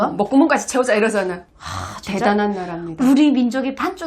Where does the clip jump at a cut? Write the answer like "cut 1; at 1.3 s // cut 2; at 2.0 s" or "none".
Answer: cut 1; at 1.4 s